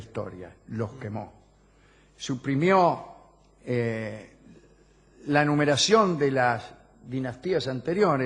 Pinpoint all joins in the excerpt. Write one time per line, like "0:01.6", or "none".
0:07.1